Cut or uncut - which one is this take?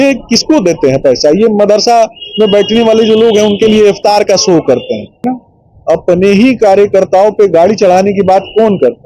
cut